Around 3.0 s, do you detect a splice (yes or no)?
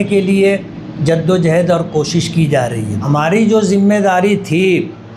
yes